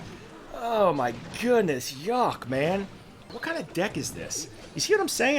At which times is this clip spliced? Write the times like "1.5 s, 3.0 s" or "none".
3.3 s

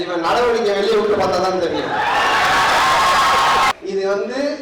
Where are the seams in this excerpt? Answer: 3.7 s

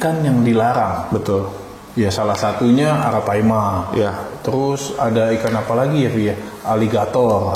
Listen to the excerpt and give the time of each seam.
none

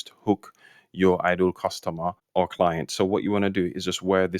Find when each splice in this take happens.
2.2 s

